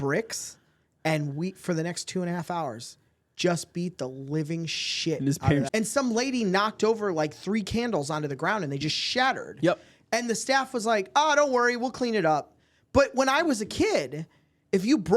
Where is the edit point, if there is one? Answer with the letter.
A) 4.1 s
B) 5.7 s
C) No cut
B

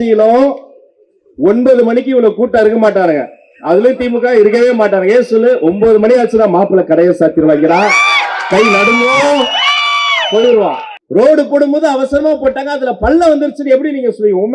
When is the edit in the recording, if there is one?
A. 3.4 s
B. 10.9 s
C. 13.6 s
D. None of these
B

